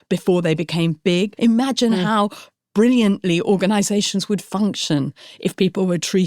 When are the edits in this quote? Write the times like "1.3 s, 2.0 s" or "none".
1.3 s